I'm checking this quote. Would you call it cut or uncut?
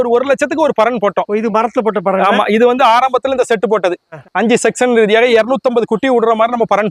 uncut